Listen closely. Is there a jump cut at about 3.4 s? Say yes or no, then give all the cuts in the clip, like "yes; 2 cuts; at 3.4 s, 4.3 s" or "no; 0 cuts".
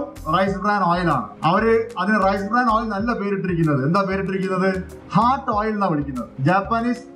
no; 3 cuts; at 1.3 s, 4.9 s, 6.2 s